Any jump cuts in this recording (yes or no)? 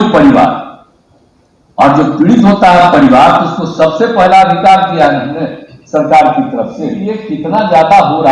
yes